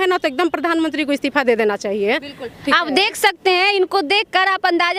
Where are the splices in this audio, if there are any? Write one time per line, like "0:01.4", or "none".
none